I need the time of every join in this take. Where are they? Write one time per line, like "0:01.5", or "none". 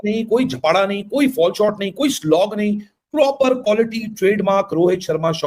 none